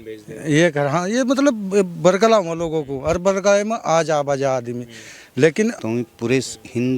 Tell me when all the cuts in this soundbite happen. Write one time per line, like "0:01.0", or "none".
0:05.8